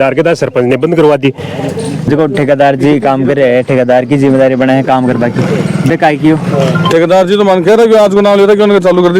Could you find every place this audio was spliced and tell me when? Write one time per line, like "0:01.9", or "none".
0:02.0